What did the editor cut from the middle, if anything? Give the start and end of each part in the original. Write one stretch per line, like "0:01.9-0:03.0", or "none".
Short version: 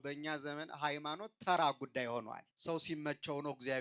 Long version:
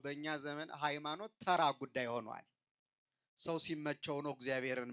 0:02.4-0:03.2